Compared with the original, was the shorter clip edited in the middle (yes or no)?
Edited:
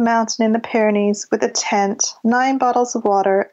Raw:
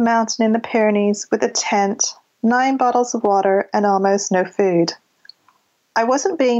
yes